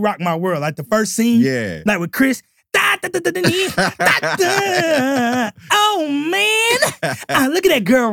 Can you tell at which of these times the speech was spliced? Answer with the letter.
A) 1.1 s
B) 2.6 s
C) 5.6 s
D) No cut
D